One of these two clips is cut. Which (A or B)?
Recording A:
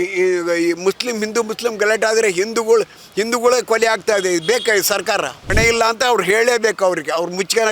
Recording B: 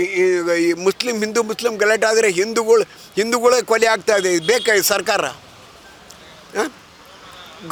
A